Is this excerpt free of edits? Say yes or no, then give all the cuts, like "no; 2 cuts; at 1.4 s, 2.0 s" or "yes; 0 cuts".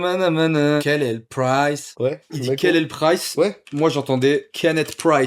no; 2 cuts; at 0.8 s, 2.4 s